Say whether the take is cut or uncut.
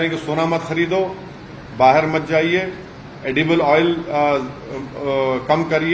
uncut